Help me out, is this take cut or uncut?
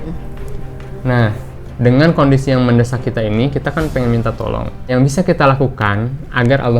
cut